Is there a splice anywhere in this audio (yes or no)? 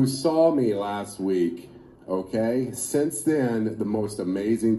no